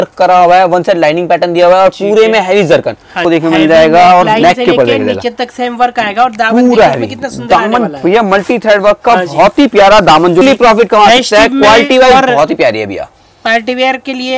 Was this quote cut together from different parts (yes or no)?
yes